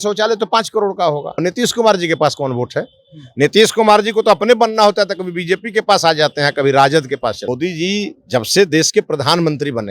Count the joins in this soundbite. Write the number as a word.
two